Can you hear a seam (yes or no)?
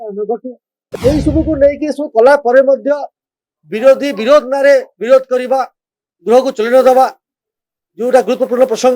yes